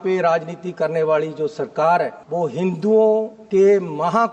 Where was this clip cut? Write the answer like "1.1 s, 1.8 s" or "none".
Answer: 2.2 s, 3.4 s